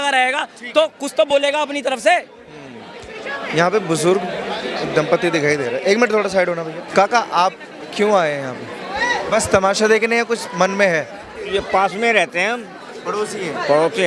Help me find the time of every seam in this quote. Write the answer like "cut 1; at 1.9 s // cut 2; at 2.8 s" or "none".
none